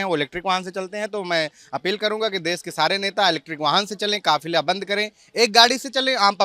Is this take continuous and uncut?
yes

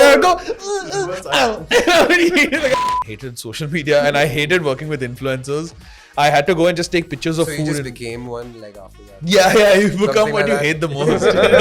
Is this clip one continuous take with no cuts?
no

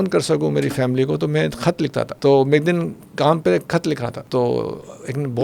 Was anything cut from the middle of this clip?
yes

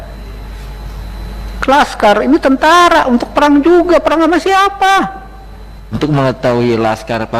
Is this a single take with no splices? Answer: no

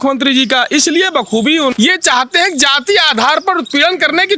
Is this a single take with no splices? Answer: no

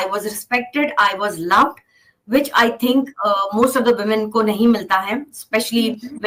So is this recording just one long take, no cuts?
yes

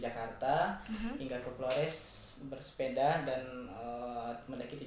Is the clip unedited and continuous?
yes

